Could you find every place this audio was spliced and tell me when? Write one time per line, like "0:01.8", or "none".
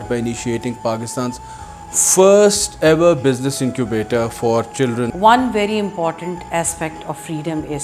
0:05.1

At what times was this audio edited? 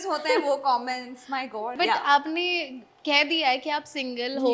0:01.7

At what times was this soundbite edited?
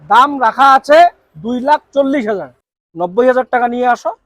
0:02.5

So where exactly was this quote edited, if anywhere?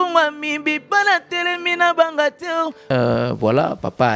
0:02.9

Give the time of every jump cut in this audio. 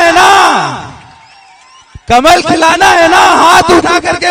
none

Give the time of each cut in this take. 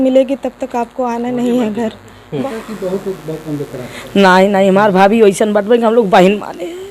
0:02.4

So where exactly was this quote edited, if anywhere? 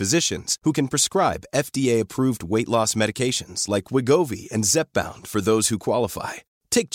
none

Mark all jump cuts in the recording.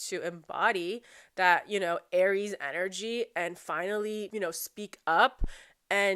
0:04.3

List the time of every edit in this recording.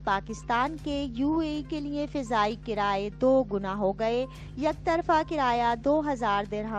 none

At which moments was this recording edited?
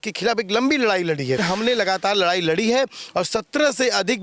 0:01.4

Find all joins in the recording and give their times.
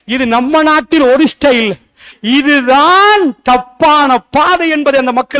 0:02.1

